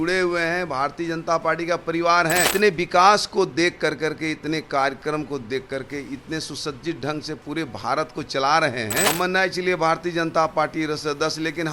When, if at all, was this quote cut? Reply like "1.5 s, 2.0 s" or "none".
2.5 s, 9.1 s